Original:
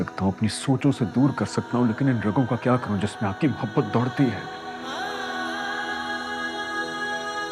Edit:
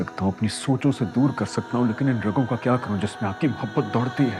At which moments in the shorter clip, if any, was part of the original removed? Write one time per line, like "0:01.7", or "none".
none